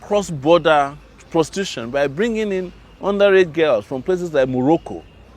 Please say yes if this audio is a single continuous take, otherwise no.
yes